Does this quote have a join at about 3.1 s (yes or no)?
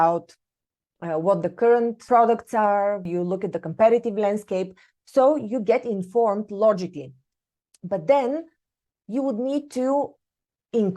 yes